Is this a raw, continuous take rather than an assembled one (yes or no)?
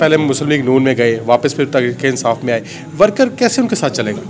yes